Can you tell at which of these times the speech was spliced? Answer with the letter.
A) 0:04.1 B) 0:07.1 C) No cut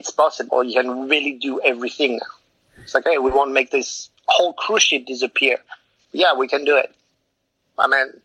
C